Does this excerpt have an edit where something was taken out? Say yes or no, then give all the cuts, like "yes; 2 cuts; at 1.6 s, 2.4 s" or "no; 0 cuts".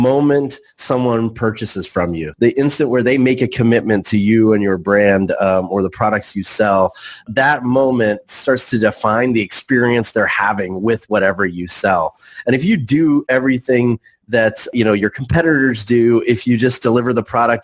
yes; 3 cuts; at 2.2 s, 7.3 s, 14.7 s